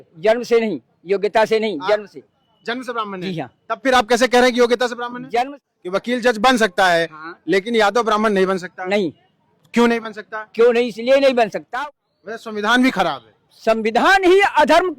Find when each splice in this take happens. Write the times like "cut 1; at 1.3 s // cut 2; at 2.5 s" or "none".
cut 1; at 5.6 s // cut 2; at 11.6 s